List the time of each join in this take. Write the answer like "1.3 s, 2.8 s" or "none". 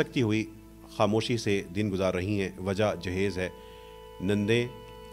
none